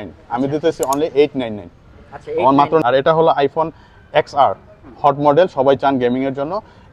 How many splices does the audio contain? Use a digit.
1